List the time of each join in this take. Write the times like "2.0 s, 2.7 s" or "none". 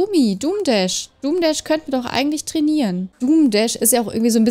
3.1 s